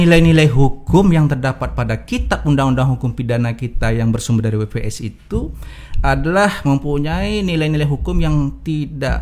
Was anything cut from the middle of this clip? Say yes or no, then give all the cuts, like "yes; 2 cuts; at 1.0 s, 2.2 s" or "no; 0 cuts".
no; 0 cuts